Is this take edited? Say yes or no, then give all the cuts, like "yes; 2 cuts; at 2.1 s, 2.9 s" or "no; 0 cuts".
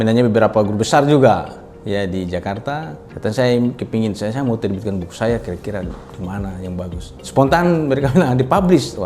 yes; 2 cuts; at 3.0 s, 7.1 s